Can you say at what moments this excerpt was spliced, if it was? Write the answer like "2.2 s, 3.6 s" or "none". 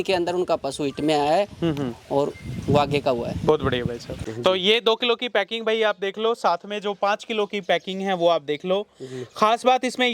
4.1 s